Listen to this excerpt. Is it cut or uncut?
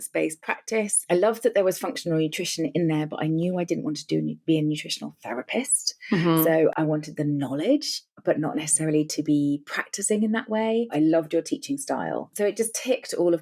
cut